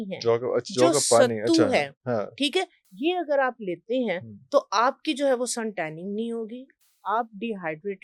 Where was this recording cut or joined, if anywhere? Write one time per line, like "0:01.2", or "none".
none

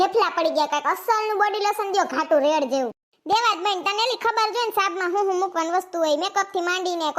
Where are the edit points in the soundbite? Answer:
0:03.1

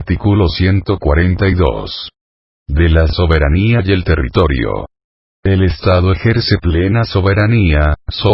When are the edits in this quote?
0:01.0

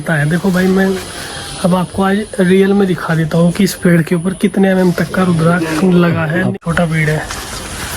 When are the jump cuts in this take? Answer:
0:06.5

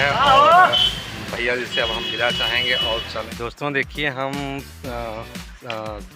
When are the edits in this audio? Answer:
0:03.3

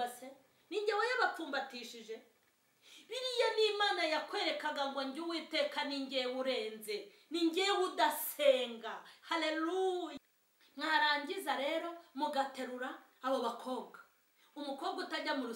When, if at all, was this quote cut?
0:10.2

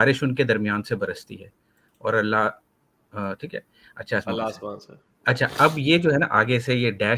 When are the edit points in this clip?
none

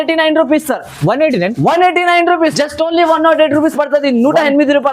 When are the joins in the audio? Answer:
0:02.5

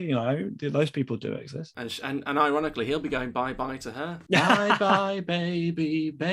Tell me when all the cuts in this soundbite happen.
none

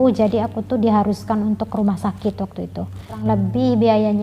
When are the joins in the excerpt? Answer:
0:03.2

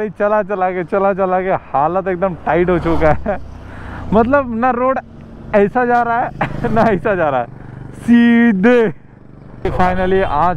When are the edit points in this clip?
0:09.6

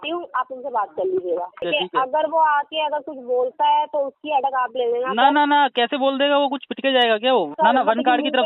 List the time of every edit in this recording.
0:01.5
0:07.5

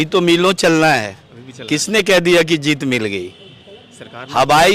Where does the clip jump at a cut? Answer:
none

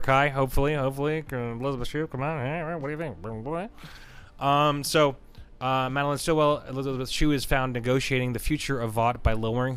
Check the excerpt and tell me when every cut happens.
none

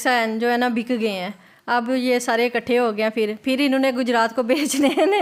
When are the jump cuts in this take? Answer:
none

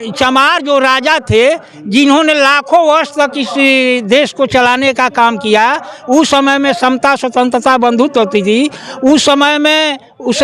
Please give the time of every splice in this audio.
none

